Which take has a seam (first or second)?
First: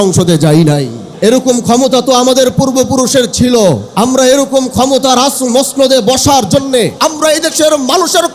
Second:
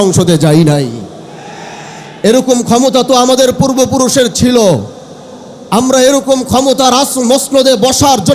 first